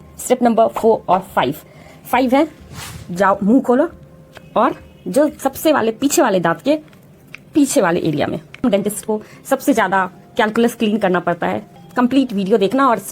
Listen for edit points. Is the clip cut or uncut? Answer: cut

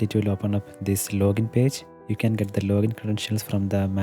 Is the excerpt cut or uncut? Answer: uncut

